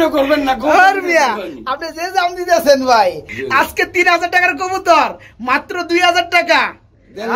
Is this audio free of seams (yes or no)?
no